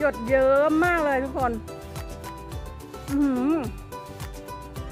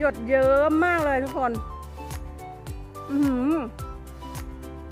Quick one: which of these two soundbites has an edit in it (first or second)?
first